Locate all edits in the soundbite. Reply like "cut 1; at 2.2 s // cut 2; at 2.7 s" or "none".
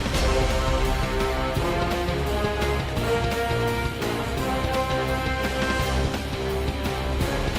none